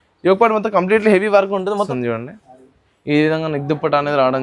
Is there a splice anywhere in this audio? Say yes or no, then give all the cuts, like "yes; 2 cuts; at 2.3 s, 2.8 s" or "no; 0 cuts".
yes; 1 cut; at 1.9 s